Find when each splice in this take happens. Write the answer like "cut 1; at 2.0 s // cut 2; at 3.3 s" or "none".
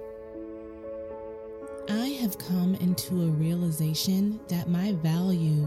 none